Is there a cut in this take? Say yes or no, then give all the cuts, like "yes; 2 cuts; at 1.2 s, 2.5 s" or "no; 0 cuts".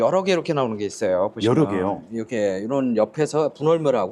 no; 0 cuts